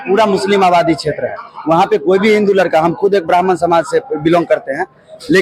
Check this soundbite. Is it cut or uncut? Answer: uncut